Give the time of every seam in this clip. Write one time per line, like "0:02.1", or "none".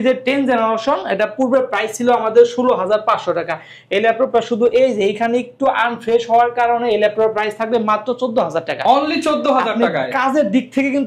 none